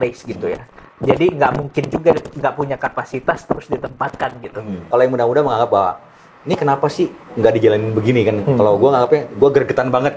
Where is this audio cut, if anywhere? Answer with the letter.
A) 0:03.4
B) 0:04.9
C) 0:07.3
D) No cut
B